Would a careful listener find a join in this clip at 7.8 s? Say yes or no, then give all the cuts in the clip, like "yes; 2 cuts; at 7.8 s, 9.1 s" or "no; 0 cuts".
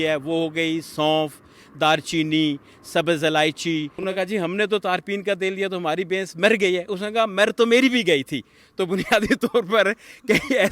no; 1 cut; at 4.0 s